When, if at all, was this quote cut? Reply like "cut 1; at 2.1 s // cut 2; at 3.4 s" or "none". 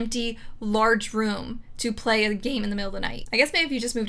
cut 1; at 3.2 s